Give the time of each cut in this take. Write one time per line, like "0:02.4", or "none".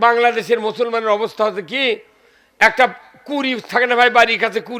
none

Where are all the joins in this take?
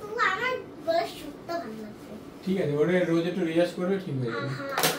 none

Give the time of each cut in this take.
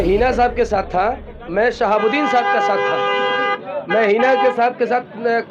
none

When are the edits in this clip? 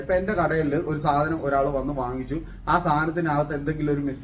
none

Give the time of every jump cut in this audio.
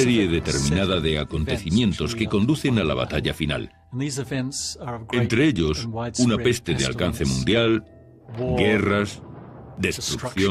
none

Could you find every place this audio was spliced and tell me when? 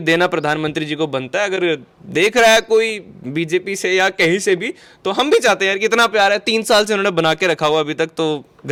none

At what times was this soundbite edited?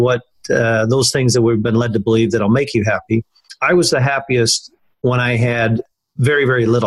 0:05.8

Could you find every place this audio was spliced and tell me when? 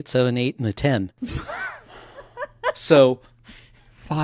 0:01.1

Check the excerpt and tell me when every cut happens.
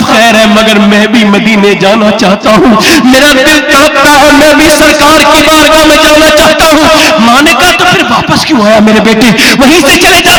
none

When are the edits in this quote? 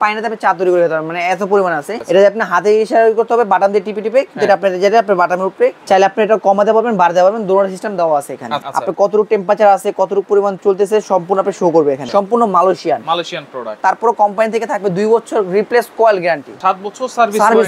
0:02.0
0:05.8
0:08.7
0:12.0
0:13.7
0:16.5

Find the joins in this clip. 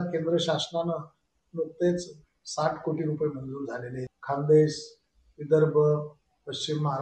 0:04.0

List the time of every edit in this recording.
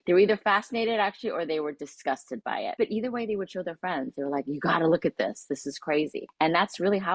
0:02.7
0:06.2

